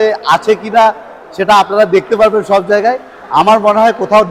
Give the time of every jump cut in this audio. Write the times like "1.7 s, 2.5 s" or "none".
none